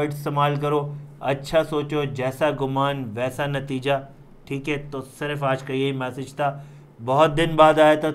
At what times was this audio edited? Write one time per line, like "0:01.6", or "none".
none